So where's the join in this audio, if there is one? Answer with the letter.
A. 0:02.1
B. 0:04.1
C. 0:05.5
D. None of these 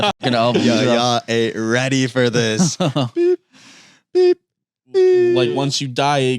C